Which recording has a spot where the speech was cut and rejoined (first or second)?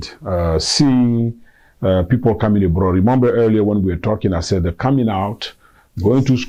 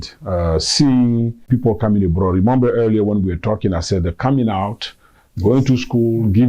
second